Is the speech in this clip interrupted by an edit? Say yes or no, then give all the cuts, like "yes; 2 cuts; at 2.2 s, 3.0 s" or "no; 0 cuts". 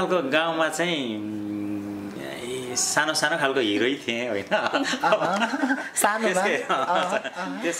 no; 0 cuts